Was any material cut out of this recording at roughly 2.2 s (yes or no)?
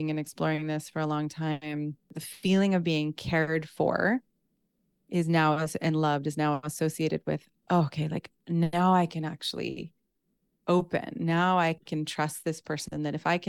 yes